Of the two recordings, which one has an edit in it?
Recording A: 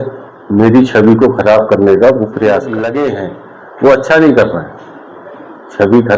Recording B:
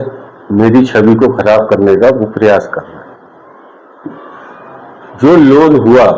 A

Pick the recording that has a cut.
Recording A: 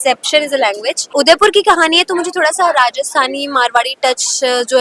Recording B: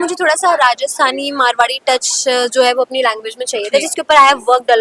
A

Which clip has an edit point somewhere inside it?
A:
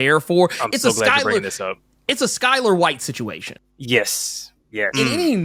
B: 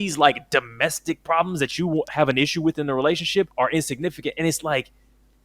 B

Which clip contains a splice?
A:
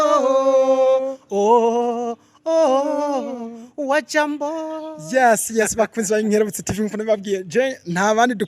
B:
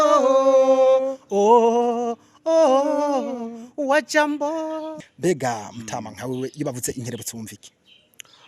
B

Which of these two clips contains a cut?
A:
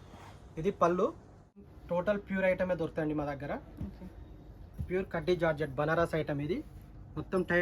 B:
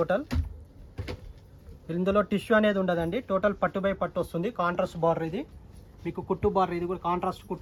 A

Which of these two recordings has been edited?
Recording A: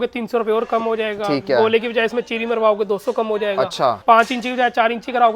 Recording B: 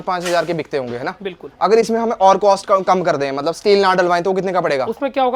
A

